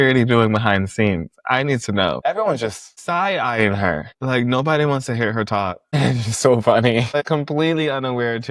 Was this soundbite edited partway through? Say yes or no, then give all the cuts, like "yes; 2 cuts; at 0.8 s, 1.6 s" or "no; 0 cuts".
yes; 2 cuts; at 2.2 s, 7.2 s